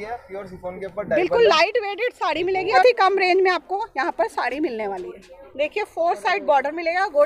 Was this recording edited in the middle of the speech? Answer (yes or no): yes